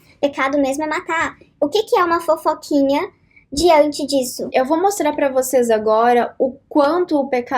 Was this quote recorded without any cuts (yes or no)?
no